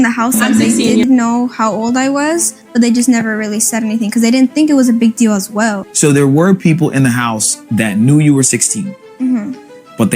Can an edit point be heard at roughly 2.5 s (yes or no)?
no